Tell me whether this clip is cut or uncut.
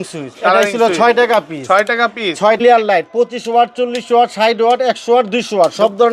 cut